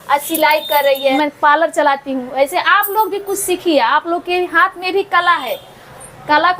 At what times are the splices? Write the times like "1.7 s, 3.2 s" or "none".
1.1 s